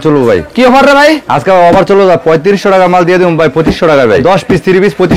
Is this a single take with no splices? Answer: no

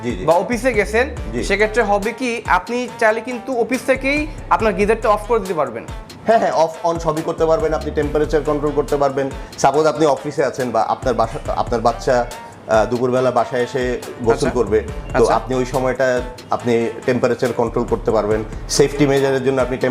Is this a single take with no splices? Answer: yes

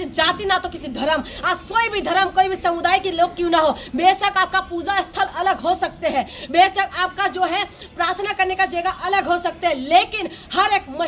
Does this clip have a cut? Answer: no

